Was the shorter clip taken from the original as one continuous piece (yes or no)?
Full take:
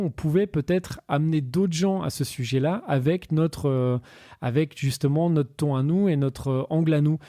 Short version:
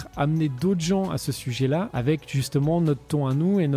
no